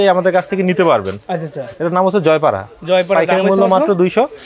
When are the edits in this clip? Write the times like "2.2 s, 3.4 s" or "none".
none